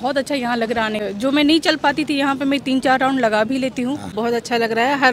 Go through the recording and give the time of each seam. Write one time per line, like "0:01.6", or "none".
0:01.0
0:04.1